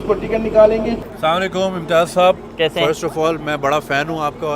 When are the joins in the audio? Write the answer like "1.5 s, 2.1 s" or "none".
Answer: 1.0 s